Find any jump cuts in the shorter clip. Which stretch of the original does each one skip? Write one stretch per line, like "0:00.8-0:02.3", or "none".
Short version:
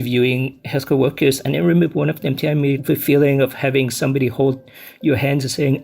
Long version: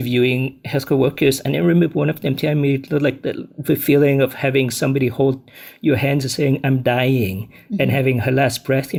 0:02.8-0:03.6